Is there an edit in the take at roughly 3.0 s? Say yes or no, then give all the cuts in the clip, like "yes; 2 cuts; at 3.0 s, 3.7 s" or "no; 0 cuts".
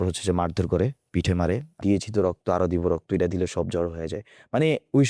no; 1 cut; at 1.8 s